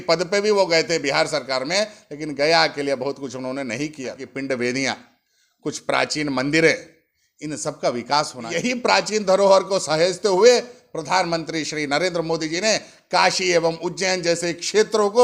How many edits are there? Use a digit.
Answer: 2